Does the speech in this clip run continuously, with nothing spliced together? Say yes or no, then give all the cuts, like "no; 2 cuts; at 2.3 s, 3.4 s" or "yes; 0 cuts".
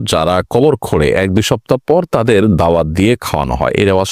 yes; 0 cuts